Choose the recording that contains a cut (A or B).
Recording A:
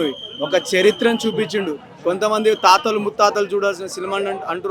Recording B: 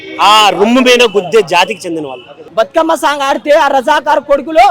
B